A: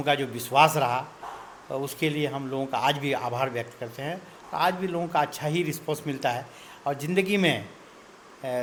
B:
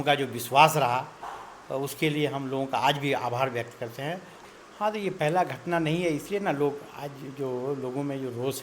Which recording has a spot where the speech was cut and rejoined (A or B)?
B